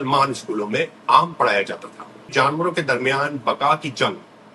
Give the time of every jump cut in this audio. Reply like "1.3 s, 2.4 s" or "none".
2.3 s